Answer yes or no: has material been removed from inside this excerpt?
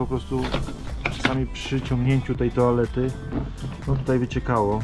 no